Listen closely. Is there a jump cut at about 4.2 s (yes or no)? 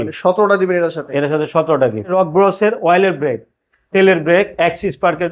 no